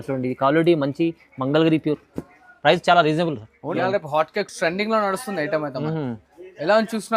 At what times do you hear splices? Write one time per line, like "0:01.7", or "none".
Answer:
0:03.6